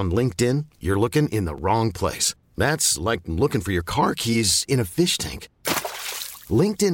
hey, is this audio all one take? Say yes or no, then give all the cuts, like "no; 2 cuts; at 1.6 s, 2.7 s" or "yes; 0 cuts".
yes; 0 cuts